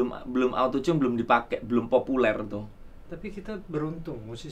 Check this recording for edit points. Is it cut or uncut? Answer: uncut